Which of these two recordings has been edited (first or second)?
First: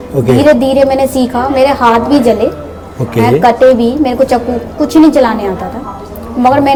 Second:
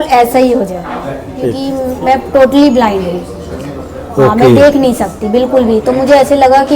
second